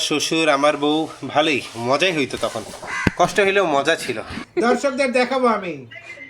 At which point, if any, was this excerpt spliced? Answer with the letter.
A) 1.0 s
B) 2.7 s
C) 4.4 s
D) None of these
C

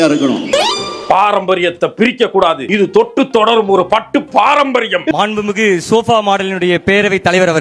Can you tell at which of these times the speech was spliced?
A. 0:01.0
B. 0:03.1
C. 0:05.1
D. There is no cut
C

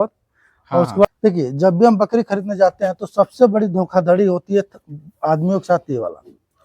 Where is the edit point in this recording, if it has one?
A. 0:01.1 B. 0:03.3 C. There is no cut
A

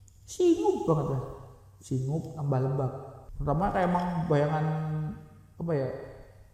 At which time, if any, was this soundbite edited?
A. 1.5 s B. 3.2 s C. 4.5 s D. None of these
B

